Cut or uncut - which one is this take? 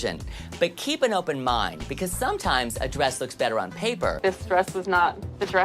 cut